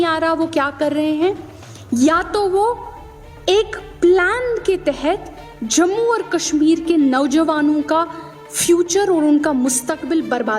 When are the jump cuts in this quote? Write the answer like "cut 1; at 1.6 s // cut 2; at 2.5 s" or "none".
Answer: none